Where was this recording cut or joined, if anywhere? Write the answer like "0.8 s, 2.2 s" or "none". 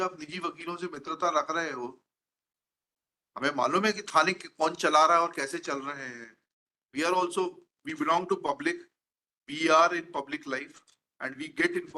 none